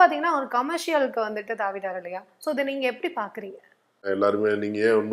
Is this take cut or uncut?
cut